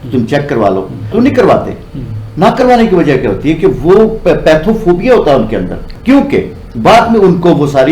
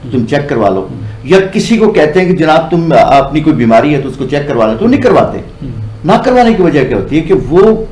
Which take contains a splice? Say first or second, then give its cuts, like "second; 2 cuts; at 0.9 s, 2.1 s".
first; 1 cut; at 1.1 s